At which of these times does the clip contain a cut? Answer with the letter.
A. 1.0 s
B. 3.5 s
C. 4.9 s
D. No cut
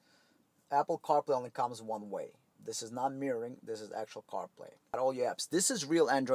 C